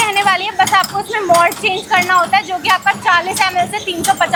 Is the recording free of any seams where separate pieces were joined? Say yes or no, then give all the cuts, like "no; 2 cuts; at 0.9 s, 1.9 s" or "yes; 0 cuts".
yes; 0 cuts